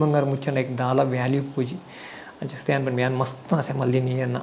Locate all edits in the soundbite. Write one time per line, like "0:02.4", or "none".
none